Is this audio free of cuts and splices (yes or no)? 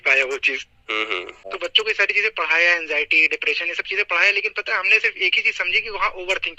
no